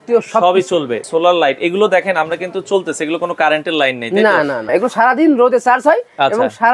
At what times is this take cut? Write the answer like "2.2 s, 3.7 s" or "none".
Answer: 1.0 s, 4.6 s